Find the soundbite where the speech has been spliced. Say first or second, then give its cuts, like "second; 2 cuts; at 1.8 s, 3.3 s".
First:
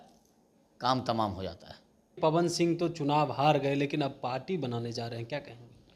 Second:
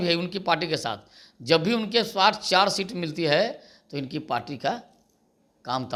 first; 1 cut; at 2.2 s